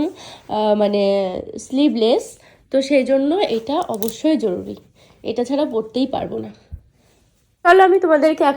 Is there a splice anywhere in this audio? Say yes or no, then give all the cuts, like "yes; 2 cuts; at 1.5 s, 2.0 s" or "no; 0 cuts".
yes; 1 cut; at 7.6 s